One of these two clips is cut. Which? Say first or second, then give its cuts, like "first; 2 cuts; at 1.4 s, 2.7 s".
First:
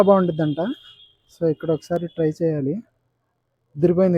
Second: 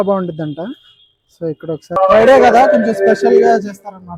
second; 1 cut; at 2.0 s